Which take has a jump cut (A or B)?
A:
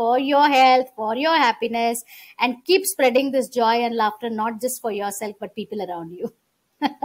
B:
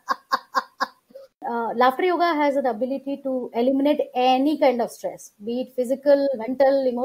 B